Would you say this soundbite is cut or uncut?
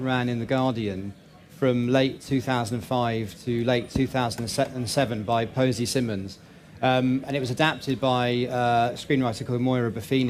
uncut